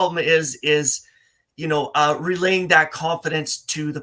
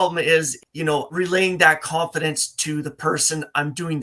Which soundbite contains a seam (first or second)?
second